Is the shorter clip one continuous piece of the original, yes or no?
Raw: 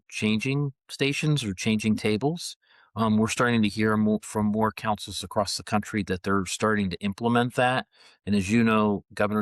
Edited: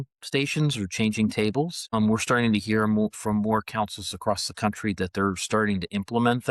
no